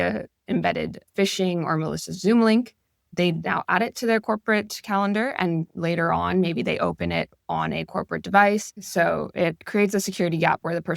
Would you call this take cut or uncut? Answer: cut